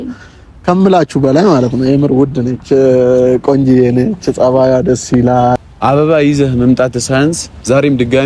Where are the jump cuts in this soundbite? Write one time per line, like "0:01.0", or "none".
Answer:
0:05.7

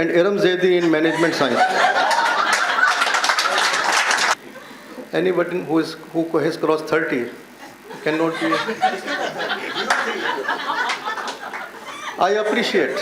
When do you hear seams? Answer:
0:04.4

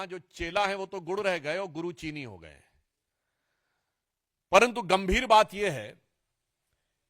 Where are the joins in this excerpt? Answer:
none

